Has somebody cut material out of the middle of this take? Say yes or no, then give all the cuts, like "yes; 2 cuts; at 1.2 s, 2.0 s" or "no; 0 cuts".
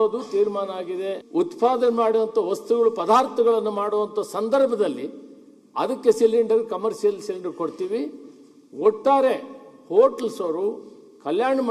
yes; 1 cut; at 1.2 s